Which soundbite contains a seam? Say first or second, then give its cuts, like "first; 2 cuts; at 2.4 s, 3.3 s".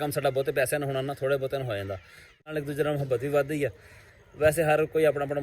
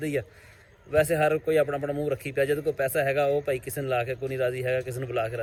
first; 1 cut; at 2.4 s